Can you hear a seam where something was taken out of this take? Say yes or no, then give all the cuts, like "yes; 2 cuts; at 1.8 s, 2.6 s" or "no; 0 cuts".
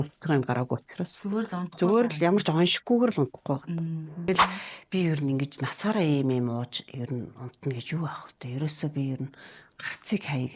yes; 1 cut; at 4.3 s